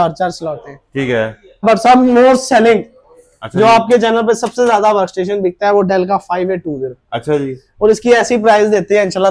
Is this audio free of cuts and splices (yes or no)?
no